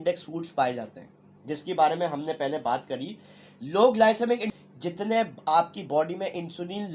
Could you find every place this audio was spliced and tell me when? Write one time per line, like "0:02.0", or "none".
0:04.5